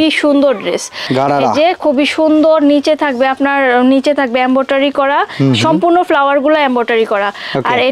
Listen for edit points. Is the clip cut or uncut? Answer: cut